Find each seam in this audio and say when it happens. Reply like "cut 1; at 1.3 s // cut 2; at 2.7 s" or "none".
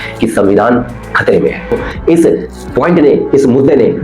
cut 1; at 1.9 s

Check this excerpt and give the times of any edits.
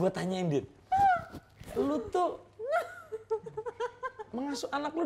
none

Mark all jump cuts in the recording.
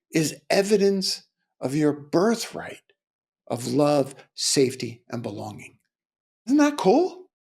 cut 1; at 6.5 s

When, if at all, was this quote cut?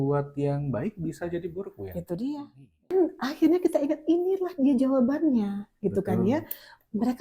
cut 1; at 2.9 s

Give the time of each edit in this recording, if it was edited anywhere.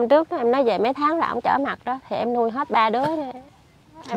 none

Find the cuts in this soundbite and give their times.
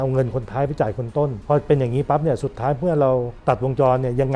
cut 1; at 1.4 s // cut 2; at 3.3 s

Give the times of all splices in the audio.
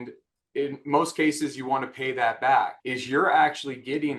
cut 1; at 2.8 s

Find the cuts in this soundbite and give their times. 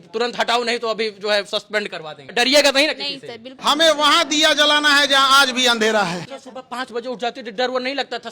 cut 1; at 2.3 s // cut 2; at 3.5 s // cut 3; at 6.2 s

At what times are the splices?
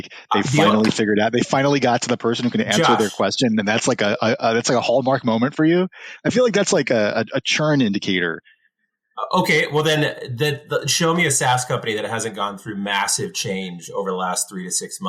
none

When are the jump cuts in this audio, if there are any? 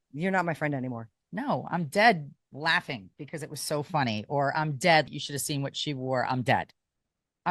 cut 1; at 5.1 s

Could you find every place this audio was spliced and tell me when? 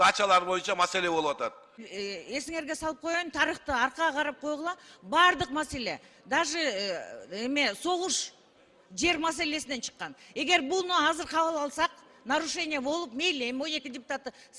cut 1; at 1.9 s

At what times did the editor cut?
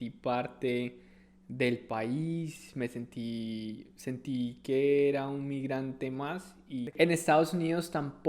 cut 1; at 6.9 s

